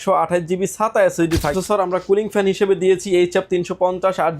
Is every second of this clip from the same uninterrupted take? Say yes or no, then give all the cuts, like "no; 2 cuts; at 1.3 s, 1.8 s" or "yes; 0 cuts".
no; 1 cut; at 1.6 s